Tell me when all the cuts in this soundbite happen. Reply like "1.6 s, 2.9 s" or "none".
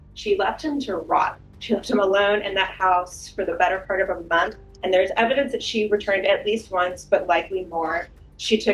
1.5 s, 4.7 s